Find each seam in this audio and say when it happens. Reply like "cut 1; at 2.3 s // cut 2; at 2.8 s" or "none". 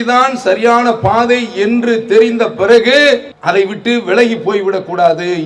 cut 1; at 3.3 s